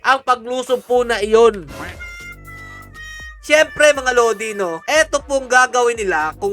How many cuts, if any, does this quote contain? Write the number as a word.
zero